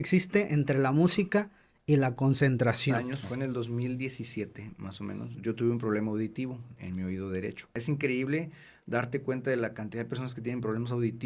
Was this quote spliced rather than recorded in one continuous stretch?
yes; 2 cuts; at 3.1 s, 7.8 s

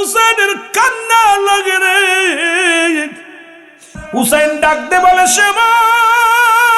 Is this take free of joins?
no; 1 cut; at 4.0 s

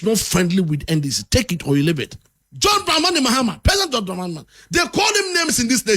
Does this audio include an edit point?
yes; 1 cut; at 2.2 s

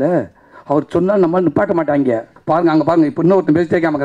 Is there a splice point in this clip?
yes; 1 cut; at 2.3 s

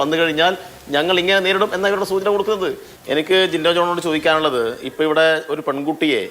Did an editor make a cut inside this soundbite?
yes; 1 cut; at 2.9 s

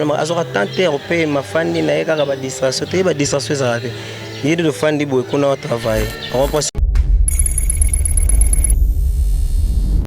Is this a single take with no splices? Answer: no; 1 cut; at 6.7 s

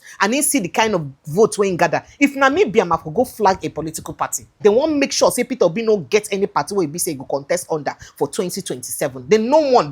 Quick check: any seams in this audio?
yes; 1 cut; at 4.6 s

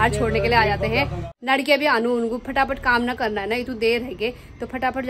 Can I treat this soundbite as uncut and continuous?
no; 1 cut; at 1.2 s

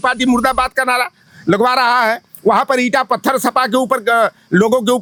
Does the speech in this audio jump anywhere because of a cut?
no; 0 cuts

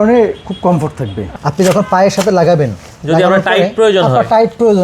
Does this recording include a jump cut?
yes; 1 cut; at 1.3 s

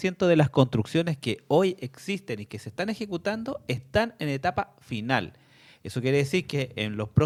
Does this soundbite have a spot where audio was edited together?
no; 0 cuts

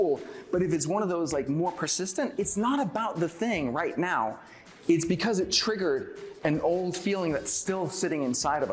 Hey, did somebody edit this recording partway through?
no; 0 cuts

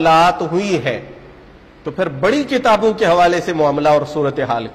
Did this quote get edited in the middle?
no; 0 cuts

